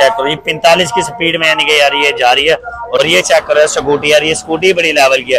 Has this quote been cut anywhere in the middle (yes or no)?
yes